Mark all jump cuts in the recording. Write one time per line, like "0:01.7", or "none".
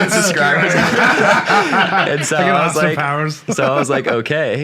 none